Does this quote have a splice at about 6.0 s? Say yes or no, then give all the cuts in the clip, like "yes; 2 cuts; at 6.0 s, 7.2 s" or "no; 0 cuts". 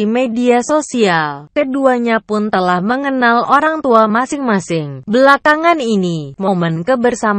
no; 0 cuts